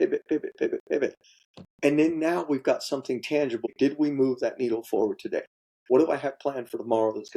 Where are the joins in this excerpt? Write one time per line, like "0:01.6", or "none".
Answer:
0:03.7
0:05.7